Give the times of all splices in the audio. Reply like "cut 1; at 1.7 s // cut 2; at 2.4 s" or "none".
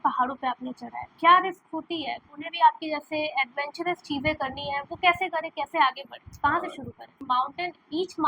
cut 1; at 2.3 s // cut 2; at 7.1 s